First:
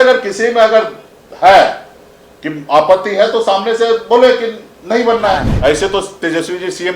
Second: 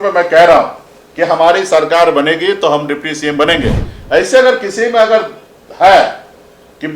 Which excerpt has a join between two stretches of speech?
first; 1 cut; at 5.5 s

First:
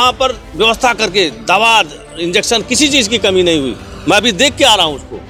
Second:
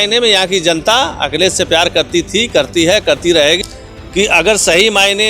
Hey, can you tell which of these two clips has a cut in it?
second; 1 cut; at 3.6 s

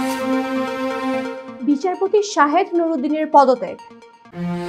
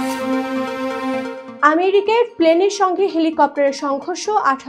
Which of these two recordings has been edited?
second; 1 cut; at 1.4 s

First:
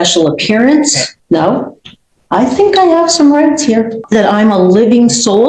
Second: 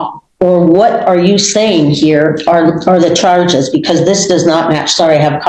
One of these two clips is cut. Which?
first; 2 cuts; at 1.1 s, 4.0 s

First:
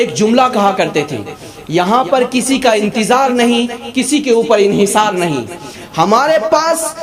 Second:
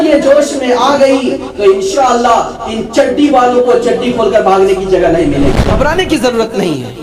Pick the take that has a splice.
second; 1 cut; at 5.6 s

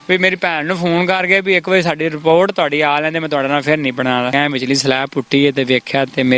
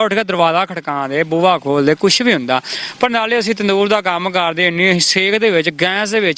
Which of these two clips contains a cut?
first; 1 cut; at 4.3 s

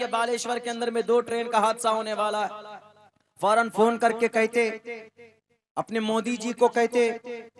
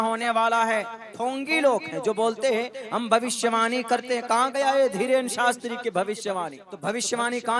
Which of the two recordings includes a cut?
second; 2 cuts; at 1.1 s, 6.6 s

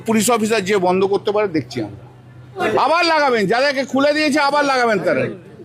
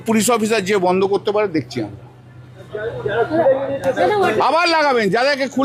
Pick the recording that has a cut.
first; 1 cut; at 2.6 s

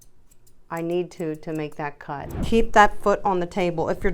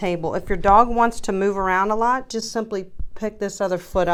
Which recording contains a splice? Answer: first; 1 cut; at 2.3 s

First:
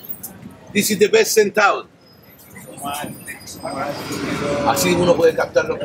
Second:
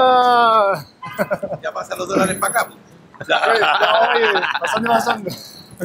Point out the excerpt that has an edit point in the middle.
first; 1 cut; at 4.0 s

